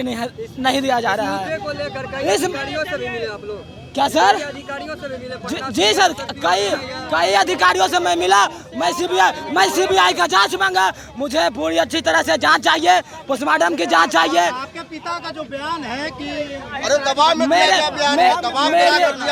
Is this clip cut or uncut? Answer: uncut